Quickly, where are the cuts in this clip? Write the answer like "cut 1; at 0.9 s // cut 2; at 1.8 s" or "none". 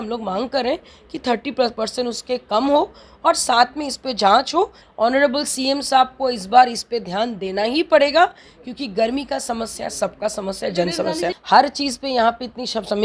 cut 1; at 4.8 s // cut 2; at 11.4 s